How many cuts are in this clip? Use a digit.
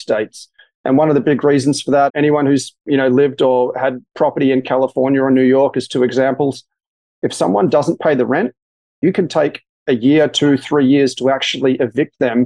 1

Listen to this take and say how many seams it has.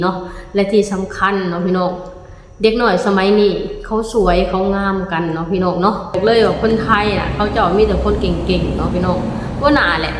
1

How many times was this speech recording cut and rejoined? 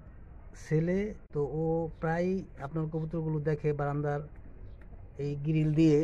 1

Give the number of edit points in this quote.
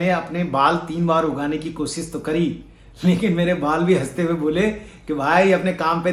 0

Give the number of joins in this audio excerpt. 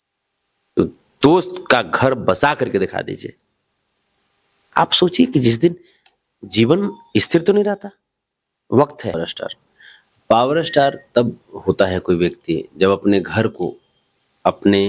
1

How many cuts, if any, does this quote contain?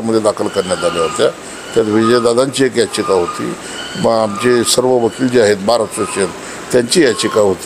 0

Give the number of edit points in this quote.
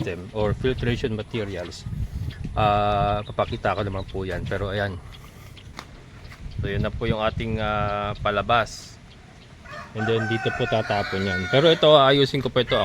1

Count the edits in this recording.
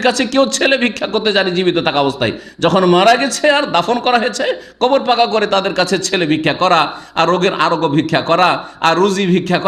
0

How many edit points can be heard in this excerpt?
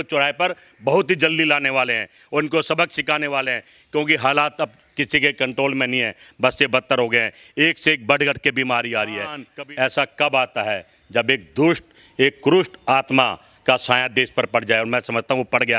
0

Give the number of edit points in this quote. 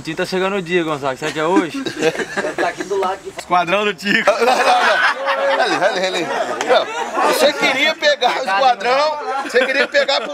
1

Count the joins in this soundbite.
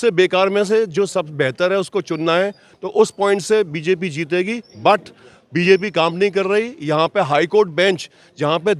0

